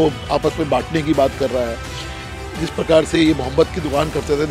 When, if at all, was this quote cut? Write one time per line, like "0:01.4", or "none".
none